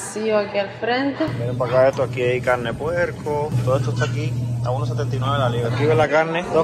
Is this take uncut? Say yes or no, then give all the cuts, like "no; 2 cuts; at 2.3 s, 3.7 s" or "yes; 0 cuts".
no; 1 cut; at 1.3 s